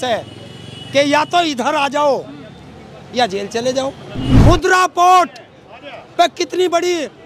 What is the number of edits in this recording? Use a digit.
1